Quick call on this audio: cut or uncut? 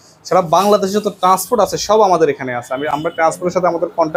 uncut